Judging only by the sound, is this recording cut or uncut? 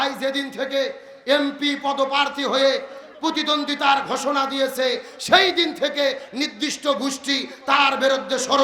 uncut